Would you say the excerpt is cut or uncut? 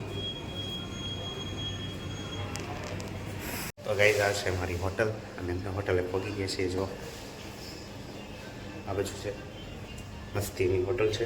cut